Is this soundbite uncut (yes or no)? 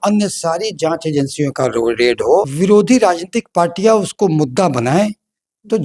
no